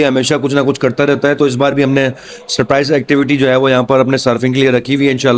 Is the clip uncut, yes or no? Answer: yes